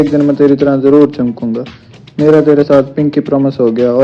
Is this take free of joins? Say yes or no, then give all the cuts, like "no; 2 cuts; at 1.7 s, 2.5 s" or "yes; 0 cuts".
yes; 0 cuts